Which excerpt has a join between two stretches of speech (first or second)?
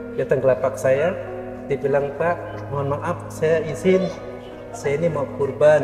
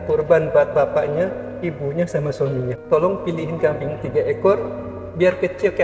second